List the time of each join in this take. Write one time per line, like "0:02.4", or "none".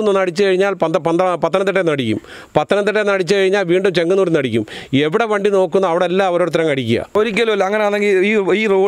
0:07.1